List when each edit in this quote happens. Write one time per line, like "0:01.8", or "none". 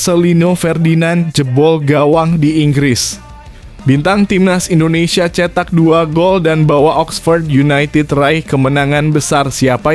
none